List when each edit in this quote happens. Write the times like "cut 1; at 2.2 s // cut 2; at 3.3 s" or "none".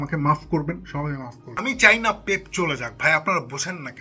cut 1; at 1.6 s